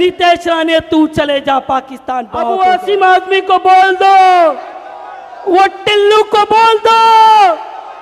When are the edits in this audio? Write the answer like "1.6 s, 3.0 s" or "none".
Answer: 2.4 s